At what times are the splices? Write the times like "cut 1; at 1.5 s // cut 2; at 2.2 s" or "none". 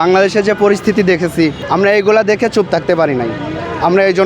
cut 1; at 1.6 s